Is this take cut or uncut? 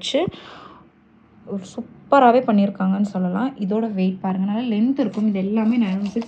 uncut